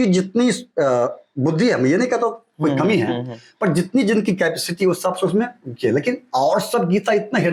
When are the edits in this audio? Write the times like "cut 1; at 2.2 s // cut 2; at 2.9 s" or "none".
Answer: none